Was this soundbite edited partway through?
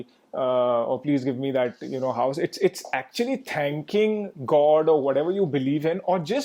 no; 0 cuts

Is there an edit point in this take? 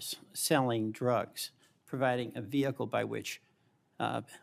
no; 0 cuts

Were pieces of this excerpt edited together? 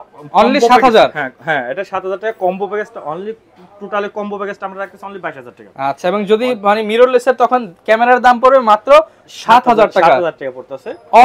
no; 0 cuts

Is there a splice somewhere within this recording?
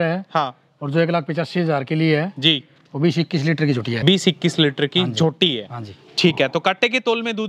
yes; 1 cut; at 4.0 s

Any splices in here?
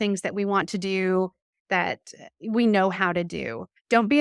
no; 0 cuts

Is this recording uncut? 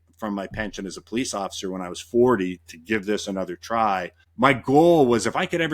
no; 1 cut; at 4.2 s

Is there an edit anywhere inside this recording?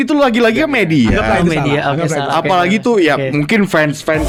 no; 0 cuts

